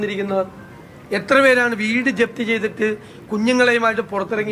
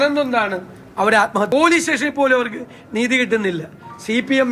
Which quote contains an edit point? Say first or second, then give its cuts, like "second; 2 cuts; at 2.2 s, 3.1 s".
second; 1 cut; at 1.5 s